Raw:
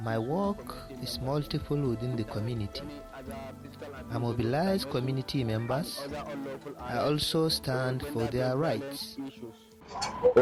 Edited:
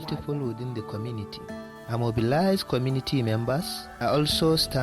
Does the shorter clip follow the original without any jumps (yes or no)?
no